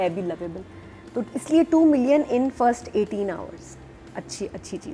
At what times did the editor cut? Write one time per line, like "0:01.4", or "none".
none